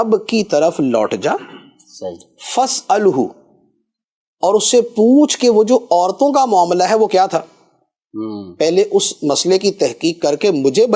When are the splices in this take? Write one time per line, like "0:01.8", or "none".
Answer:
none